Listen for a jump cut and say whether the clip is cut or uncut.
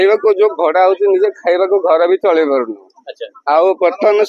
uncut